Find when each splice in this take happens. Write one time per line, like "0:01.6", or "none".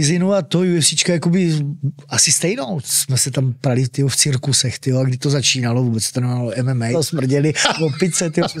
0:02.9
0:06.9